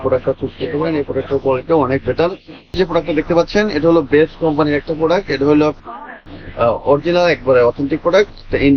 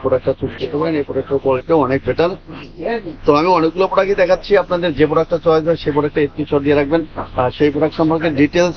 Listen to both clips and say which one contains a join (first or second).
first